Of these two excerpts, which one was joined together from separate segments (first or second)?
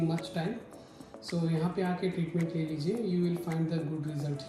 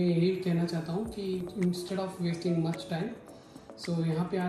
second